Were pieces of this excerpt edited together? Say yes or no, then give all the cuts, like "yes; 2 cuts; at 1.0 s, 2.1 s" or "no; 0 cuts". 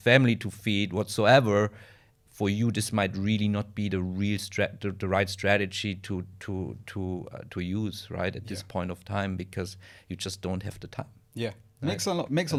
no; 0 cuts